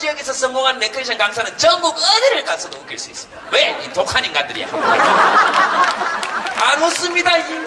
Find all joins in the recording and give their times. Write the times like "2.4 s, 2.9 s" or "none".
1.2 s

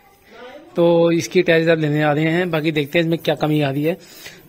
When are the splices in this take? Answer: none

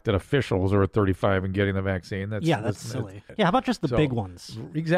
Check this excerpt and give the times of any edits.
3.2 s

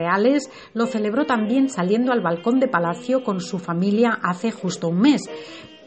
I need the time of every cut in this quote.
none

